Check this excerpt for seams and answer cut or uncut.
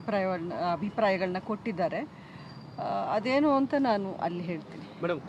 uncut